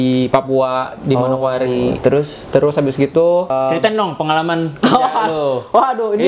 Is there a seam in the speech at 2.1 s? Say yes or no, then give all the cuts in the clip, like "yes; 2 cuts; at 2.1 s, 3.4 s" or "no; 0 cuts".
no; 1 cut; at 3.5 s